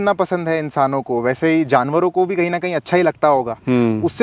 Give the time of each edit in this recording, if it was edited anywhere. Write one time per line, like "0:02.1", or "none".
none

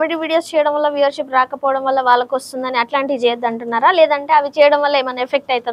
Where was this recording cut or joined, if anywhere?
none

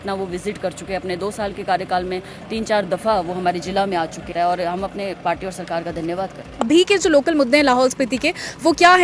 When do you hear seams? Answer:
0:04.3
0:06.7

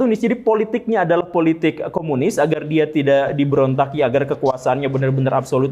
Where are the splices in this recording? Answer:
none

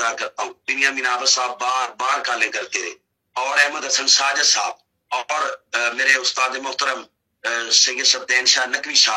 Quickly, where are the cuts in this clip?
none

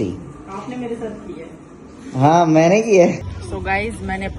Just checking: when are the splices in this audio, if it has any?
0:03.2

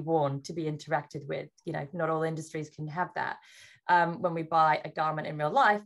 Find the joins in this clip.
none

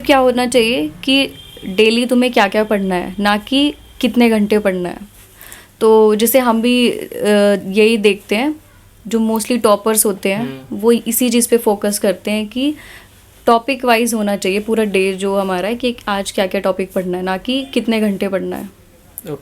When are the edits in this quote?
none

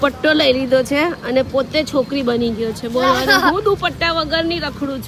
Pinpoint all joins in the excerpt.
none

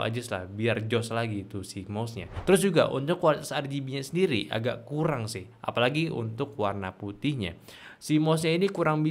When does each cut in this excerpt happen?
0:02.3

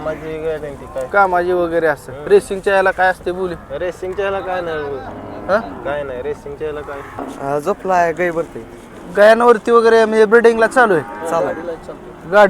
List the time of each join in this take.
0:07.3

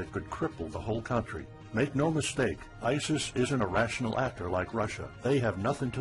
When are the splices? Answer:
0:03.5

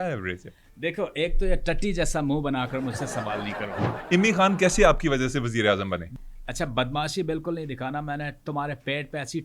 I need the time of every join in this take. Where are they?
0:03.9
0:06.2

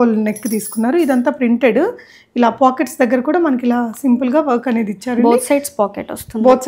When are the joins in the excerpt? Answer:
none

